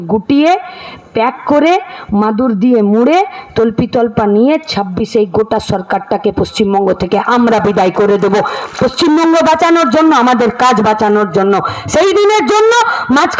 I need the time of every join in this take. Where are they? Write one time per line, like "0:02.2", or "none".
none